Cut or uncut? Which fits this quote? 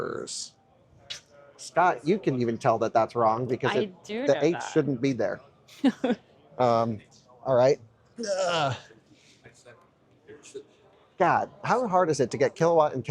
uncut